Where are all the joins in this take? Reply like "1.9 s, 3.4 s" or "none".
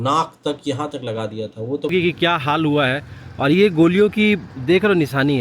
1.9 s